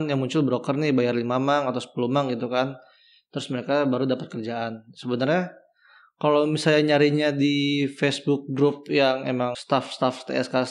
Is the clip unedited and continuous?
no; 1 cut; at 9.6 s

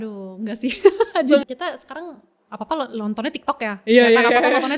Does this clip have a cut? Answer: yes; 1 cut; at 1.4 s

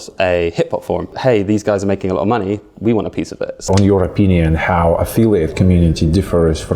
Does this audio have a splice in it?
yes; 2 cuts; at 1.1 s, 3.7 s

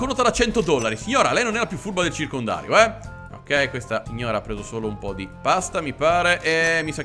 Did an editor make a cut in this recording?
no; 0 cuts

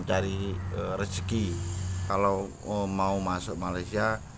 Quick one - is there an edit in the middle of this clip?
yes; 1 cut; at 2.0 s

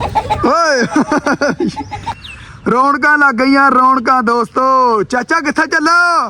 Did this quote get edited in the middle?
yes; 1 cut; at 2.1 s

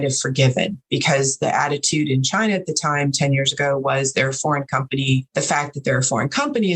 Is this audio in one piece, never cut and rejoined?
no; 1 cut; at 5.3 s

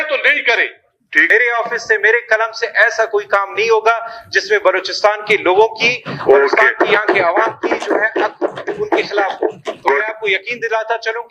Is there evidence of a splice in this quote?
yes; 1 cut; at 1.3 s

